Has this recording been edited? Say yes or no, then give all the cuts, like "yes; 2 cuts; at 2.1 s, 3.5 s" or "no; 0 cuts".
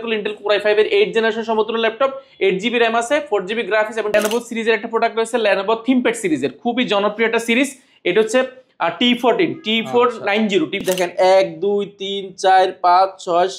yes; 2 cuts; at 4.1 s, 10.8 s